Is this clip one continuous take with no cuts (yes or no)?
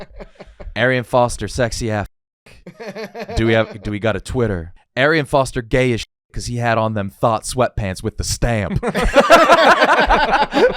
no